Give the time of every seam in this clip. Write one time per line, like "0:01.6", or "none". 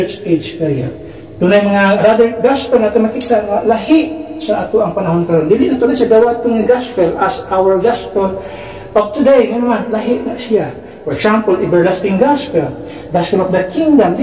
0:02.0